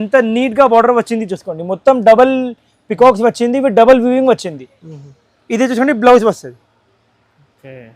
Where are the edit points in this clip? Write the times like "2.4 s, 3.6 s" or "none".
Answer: none